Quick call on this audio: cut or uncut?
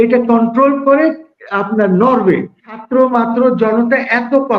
cut